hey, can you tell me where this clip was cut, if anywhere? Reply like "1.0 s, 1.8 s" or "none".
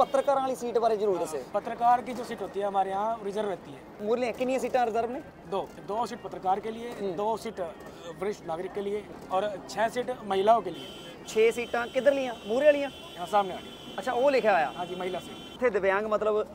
4.0 s, 5.8 s, 9.1 s, 15.5 s